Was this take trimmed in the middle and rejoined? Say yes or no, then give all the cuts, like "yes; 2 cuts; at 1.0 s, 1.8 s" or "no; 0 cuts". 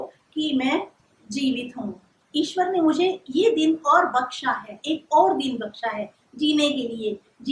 no; 0 cuts